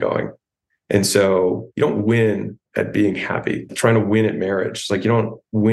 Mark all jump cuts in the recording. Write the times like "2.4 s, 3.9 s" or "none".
2.6 s, 3.7 s